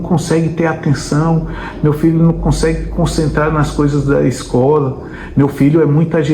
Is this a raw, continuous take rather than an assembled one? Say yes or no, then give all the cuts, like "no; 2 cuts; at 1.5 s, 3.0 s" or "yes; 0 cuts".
yes; 0 cuts